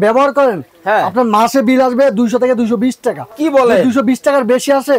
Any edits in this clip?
no; 0 cuts

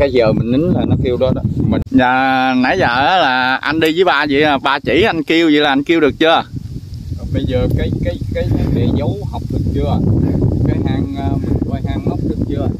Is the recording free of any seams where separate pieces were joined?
no; 1 cut; at 1.8 s

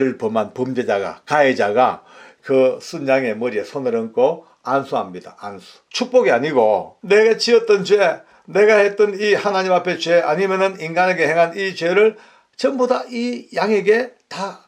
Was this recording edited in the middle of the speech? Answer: yes; 2 cuts; at 5.8 s, 6.9 s

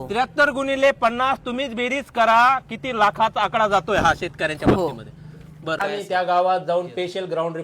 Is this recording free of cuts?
no; 1 cut; at 5.8 s

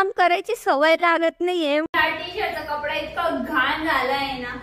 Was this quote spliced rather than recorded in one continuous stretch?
yes; 1 cut; at 1.8 s

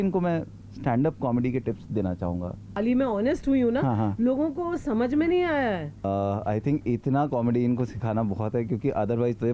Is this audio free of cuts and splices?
no; 2 cuts; at 2.7 s, 5.9 s

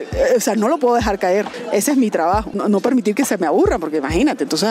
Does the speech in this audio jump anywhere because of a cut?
yes; 2 cuts; at 1.6 s, 2.6 s

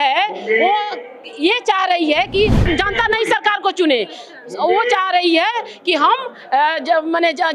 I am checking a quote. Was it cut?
yes; 1 cut; at 2.6 s

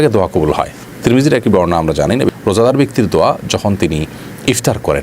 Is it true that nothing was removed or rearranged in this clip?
no; 1 cut; at 2.3 s

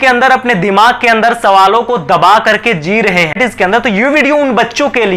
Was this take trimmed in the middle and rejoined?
yes; 1 cut; at 3.4 s

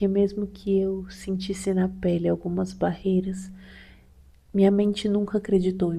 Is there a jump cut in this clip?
no; 0 cuts

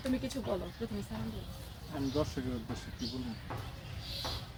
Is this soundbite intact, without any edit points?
yes; 0 cuts

